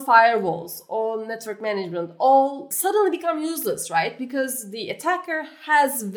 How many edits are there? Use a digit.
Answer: 1